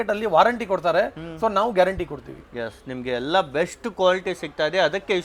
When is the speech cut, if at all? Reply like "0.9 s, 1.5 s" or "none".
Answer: none

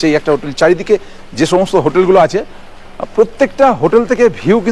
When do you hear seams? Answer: none

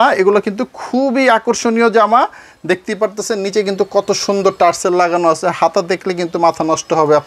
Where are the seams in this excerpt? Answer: none

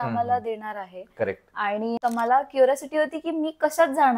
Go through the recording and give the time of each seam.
2.0 s

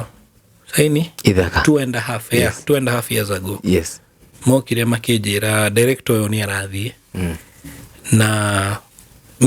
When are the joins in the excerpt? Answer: none

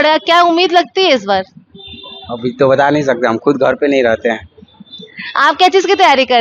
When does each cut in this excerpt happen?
none

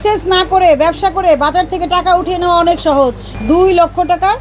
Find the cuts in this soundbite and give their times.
3.3 s

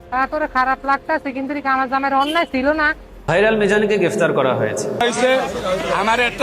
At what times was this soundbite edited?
3.2 s

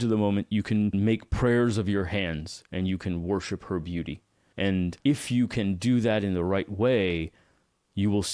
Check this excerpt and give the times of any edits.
0.9 s, 5.0 s

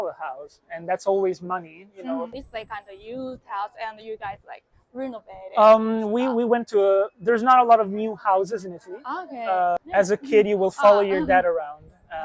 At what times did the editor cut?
2.3 s, 9.8 s

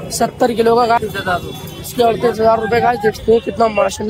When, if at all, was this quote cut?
1.0 s, 3.2 s

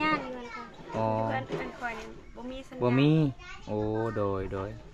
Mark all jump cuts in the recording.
none

